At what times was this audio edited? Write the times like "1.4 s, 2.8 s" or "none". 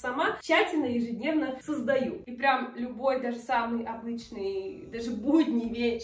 2.2 s